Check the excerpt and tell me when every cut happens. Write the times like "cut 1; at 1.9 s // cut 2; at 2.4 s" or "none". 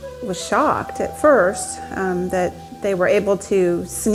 none